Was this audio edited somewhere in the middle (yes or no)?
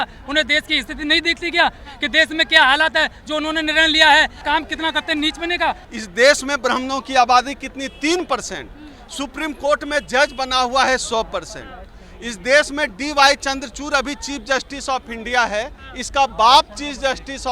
yes